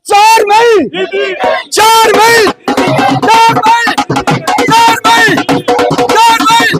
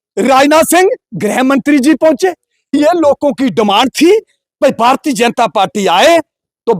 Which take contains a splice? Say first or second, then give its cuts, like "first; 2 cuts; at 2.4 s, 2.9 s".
second; 1 cut; at 2.8 s